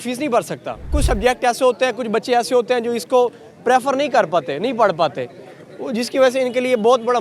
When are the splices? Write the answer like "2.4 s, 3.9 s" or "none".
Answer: 1.0 s